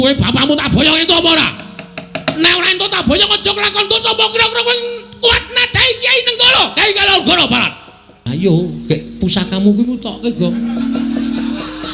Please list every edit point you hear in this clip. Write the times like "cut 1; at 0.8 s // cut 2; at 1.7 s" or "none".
cut 1; at 8.2 s